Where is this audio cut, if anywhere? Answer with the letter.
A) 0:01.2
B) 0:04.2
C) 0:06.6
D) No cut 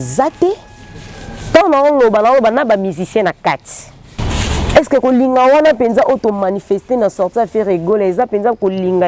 B